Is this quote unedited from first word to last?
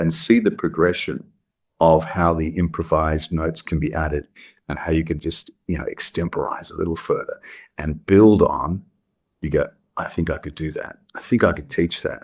yes; 0 cuts

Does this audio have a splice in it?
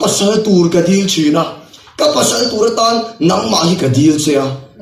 no; 0 cuts

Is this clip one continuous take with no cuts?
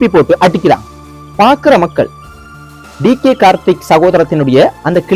no; 1 cut; at 1.3 s

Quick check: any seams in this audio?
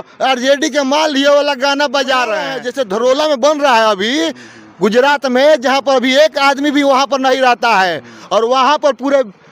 yes; 1 cut; at 2.6 s

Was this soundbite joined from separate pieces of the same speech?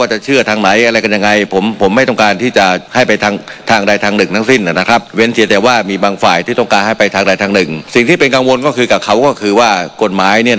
no; 0 cuts

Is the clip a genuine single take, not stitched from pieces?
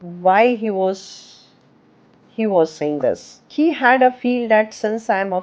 no; 1 cut; at 3.3 s

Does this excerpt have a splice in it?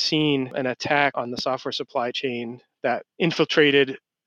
yes; 1 cut; at 1.1 s

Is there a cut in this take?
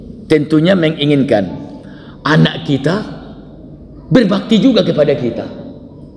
no; 0 cuts

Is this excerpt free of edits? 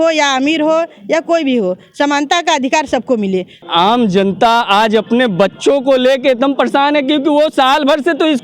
no; 1 cut; at 3.6 s

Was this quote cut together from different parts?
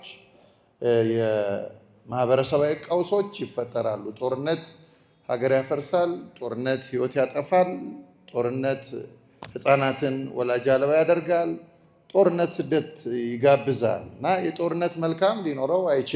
no; 0 cuts

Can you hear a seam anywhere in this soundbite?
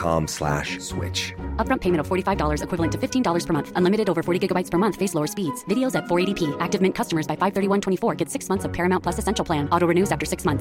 no; 0 cuts

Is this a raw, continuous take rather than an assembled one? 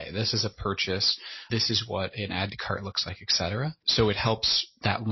no; 2 cuts; at 1.4 s, 3.8 s

